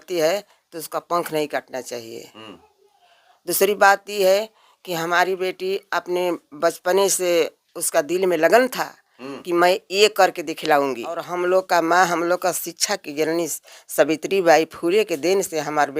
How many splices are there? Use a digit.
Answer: 1